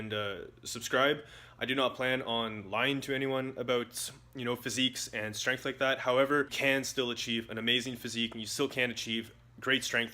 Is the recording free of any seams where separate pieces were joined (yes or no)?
no